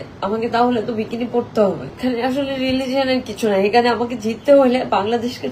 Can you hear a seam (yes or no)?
yes